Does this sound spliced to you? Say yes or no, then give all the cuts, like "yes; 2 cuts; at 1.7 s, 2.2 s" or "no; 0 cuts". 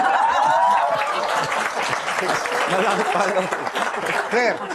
no; 0 cuts